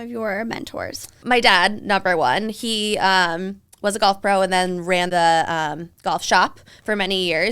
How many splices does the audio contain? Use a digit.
2